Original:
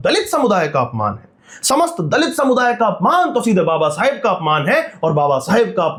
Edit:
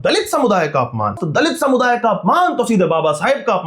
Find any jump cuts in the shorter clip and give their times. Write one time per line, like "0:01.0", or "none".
0:01.2